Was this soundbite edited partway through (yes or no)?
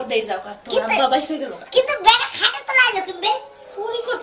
yes